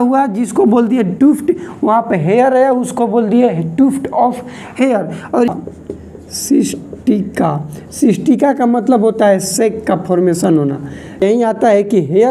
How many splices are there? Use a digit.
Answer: 2